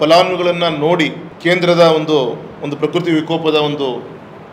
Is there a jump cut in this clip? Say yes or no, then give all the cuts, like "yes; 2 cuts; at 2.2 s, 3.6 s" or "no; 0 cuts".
yes; 1 cut; at 1.3 s